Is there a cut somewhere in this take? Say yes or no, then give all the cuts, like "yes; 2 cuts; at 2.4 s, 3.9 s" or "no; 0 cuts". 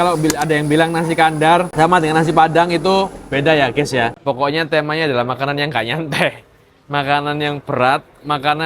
yes; 2 cuts; at 1.7 s, 4.2 s